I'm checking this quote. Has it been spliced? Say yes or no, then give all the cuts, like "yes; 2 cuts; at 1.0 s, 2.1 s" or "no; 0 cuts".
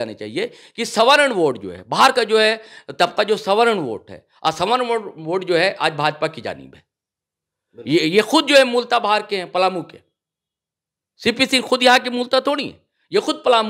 no; 0 cuts